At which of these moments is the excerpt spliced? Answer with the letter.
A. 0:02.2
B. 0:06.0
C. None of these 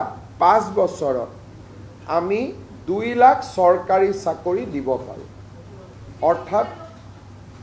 C